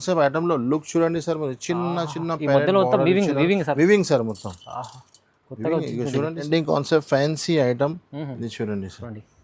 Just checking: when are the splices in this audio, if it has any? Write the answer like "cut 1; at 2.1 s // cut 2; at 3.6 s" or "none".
cut 1; at 6.5 s